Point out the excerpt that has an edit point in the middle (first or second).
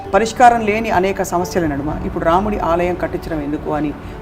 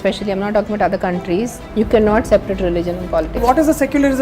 second